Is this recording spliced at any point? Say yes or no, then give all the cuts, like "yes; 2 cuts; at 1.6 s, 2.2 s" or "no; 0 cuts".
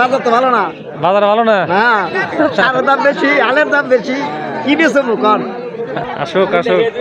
yes; 1 cut; at 6.0 s